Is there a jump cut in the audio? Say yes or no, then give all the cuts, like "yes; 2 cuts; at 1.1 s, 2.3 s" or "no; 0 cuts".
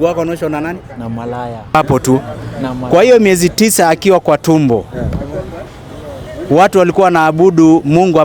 yes; 1 cut; at 1.7 s